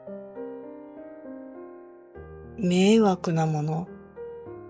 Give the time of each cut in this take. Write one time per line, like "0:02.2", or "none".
0:02.6